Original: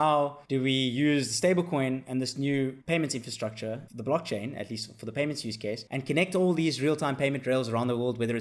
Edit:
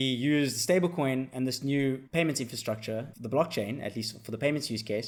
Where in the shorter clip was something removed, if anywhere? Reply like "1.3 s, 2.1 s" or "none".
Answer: none